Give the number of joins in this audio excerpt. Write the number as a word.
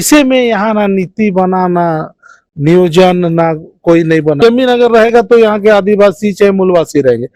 one